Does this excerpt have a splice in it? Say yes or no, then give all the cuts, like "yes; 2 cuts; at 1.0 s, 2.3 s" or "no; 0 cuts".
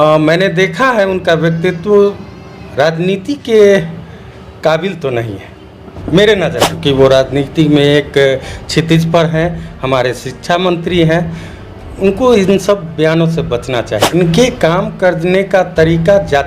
yes; 2 cuts; at 6.7 s, 14.0 s